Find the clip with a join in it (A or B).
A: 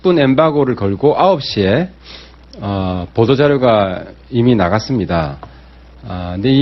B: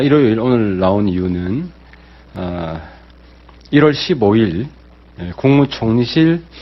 A